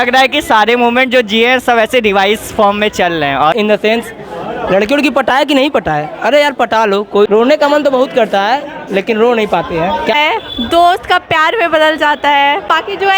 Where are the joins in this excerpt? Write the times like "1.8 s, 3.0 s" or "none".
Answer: 3.5 s, 7.3 s, 10.1 s